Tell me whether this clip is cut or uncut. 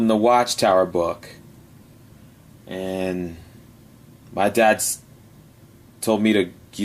cut